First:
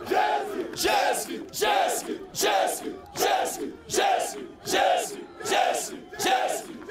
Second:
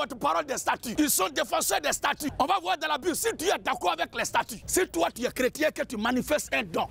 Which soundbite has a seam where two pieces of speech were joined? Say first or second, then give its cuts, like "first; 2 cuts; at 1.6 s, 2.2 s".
second; 3 cuts; at 0.9 s, 2.3 s, 4.6 s